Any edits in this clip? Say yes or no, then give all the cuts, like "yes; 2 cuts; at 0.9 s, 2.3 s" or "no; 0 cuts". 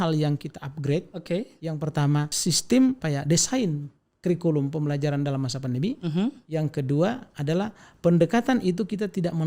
yes; 2 cuts; at 2.3 s, 3.0 s